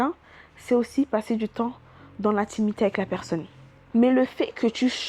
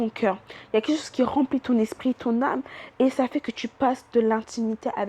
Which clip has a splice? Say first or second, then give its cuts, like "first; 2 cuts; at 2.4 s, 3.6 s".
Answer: first; 1 cut; at 3.8 s